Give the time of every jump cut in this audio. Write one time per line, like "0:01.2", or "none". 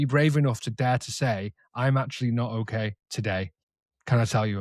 0:03.3